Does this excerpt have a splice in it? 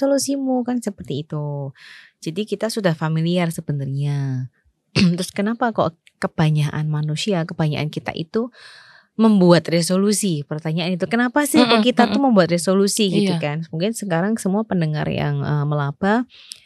no; 0 cuts

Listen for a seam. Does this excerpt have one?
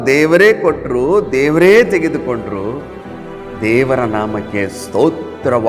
no; 0 cuts

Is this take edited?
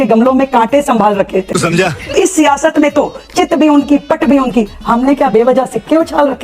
yes; 1 cut; at 1.8 s

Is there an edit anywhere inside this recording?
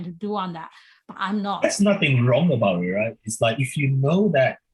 no; 0 cuts

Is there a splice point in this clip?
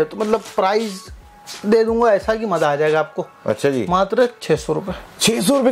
no; 0 cuts

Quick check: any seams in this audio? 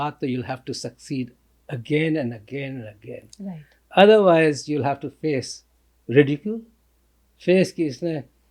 no; 0 cuts

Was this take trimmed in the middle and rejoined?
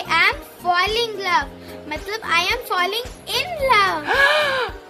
no; 0 cuts

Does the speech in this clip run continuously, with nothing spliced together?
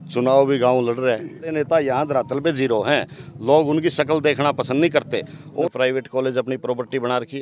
no; 2 cuts; at 1.5 s, 5.6 s

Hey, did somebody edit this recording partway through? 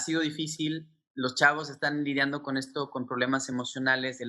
no; 0 cuts

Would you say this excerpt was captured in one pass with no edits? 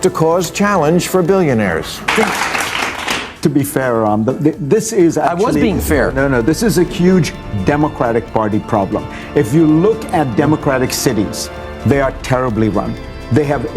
no; 1 cut; at 1.9 s

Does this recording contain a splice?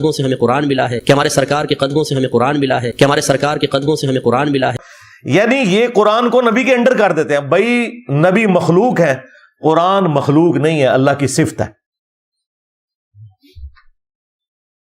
no; 0 cuts

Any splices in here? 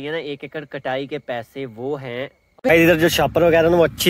yes; 1 cut; at 2.7 s

